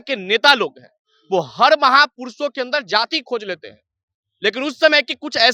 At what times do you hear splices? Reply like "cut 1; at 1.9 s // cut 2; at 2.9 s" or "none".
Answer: none